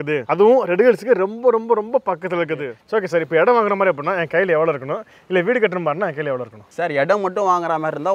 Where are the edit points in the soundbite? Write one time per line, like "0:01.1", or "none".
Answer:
0:02.7